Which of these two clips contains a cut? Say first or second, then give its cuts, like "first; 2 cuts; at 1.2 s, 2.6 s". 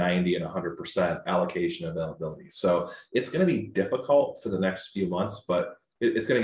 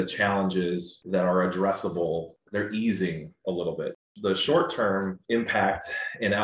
second; 4 cuts; at 0.9 s, 2.4 s, 4.0 s, 5.2 s